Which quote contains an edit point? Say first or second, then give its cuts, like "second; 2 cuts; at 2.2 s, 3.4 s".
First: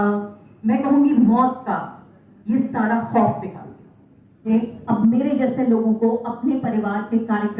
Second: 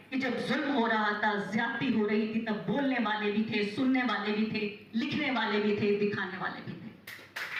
first; 1 cut; at 4.5 s